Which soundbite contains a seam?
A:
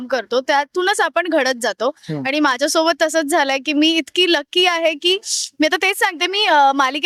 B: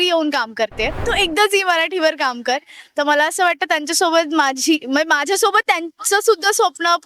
B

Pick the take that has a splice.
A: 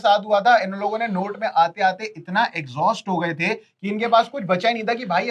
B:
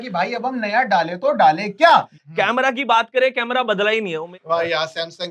B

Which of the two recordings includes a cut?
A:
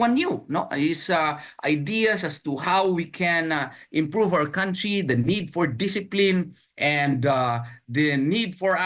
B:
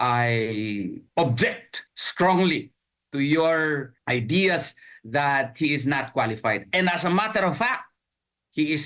B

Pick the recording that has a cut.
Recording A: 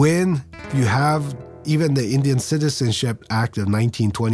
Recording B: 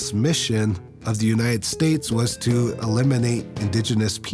A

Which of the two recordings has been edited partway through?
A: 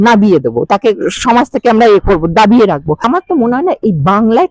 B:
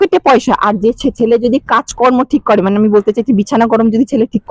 A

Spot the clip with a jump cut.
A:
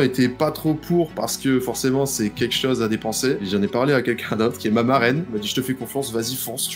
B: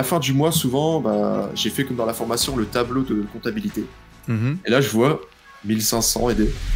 A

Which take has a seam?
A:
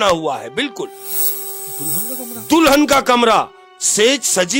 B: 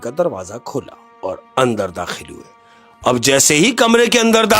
B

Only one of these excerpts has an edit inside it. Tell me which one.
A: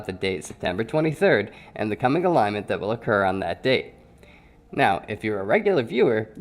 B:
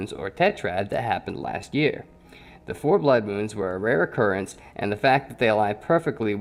A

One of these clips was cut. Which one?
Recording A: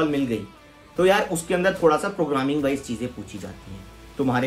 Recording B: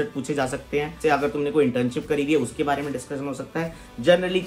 B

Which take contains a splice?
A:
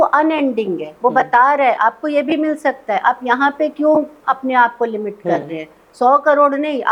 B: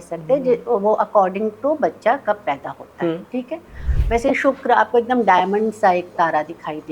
B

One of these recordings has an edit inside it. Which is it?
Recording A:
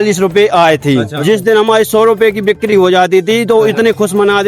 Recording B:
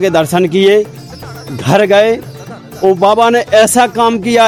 A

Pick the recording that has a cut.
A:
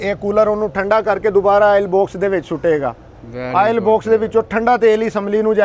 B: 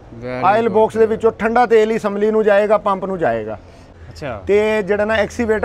B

